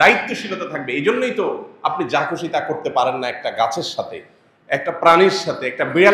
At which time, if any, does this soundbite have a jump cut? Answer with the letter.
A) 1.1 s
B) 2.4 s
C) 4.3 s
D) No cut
D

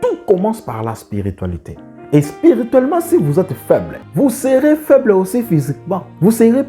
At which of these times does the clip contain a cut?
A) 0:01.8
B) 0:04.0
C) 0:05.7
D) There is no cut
B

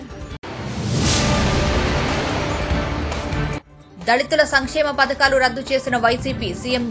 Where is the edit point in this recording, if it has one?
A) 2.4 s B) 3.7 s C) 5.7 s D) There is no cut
B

